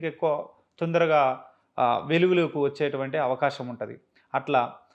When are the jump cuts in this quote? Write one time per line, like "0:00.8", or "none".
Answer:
none